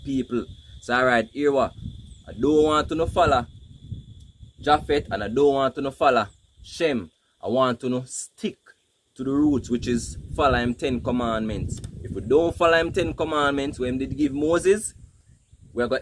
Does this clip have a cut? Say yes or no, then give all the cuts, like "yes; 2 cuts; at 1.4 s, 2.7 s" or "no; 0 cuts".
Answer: no; 0 cuts